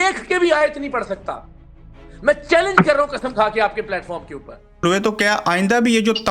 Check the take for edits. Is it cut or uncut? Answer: cut